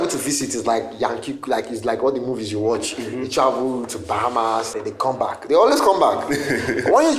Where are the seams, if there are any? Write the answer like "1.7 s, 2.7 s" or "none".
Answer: 4.7 s